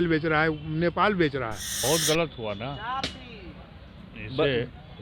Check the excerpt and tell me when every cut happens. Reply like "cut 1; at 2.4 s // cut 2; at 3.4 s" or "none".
cut 1; at 1.7 s